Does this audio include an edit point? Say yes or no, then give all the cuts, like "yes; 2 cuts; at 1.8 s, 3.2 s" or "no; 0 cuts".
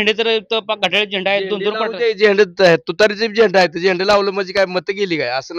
no; 0 cuts